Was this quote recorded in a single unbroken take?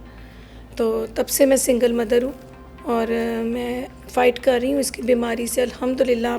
yes; 0 cuts

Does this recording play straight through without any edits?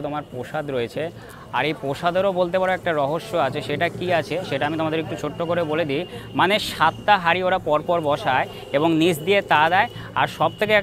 yes; 0 cuts

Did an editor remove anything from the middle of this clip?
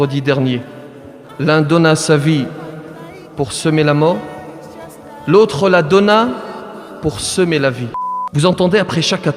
yes; 1 cut; at 8.2 s

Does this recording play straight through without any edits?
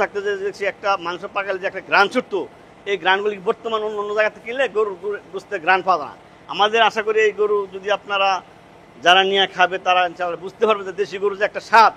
yes; 0 cuts

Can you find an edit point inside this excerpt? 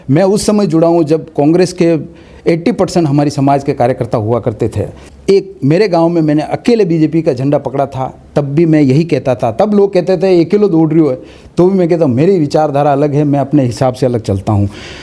no; 0 cuts

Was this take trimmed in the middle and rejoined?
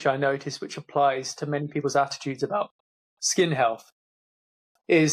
no; 0 cuts

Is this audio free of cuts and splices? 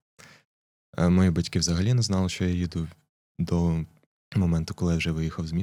yes; 0 cuts

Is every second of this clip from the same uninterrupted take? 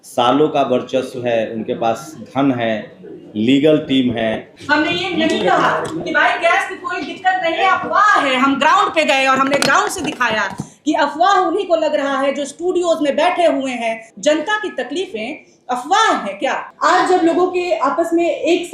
no; 3 cuts; at 4.5 s, 14.1 s, 16.7 s

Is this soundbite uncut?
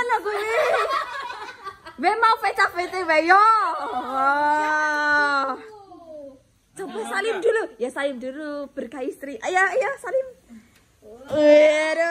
yes; 0 cuts

